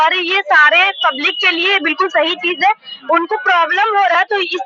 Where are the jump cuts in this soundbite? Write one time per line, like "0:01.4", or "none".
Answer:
none